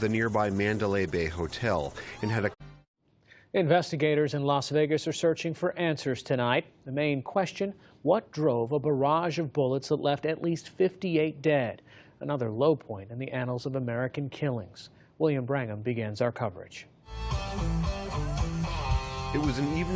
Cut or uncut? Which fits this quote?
uncut